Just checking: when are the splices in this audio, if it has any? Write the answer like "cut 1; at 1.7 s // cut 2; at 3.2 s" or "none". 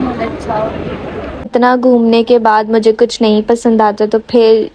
cut 1; at 1.5 s